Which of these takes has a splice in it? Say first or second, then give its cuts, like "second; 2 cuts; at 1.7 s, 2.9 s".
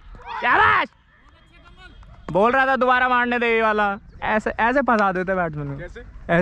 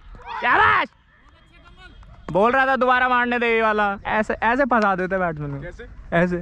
second; 1 cut; at 4.0 s